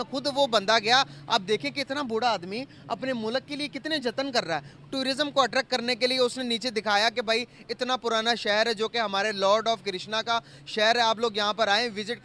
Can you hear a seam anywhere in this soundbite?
no; 0 cuts

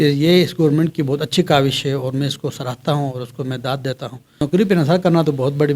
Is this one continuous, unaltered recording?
no; 1 cut; at 4.3 s

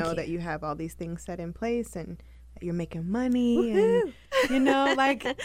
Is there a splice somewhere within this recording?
no; 0 cuts

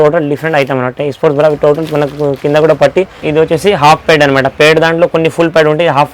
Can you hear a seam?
yes; 1 cut; at 3.2 s

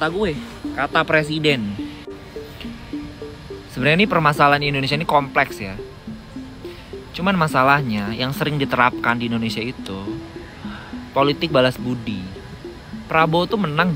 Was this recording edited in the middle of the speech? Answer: yes; 1 cut; at 1.8 s

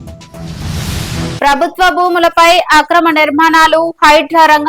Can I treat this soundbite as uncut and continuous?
no; 1 cut; at 1.4 s

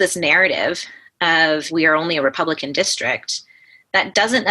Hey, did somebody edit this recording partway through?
yes; 1 cut; at 1.7 s

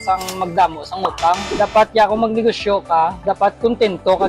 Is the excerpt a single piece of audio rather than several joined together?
no; 1 cut; at 1.5 s

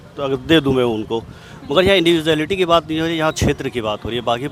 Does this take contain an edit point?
no; 0 cuts

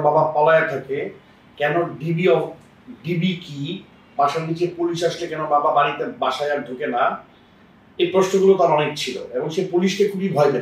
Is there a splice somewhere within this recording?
no; 0 cuts

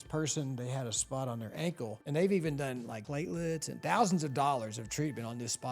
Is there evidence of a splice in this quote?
yes; 2 cuts; at 2.0 s, 3.0 s

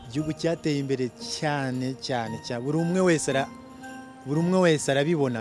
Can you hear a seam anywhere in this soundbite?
no; 0 cuts

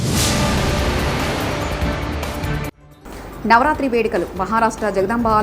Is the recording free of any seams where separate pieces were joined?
no; 1 cut; at 2.9 s

